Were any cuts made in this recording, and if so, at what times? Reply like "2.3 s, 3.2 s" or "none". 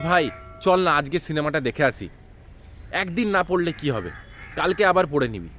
none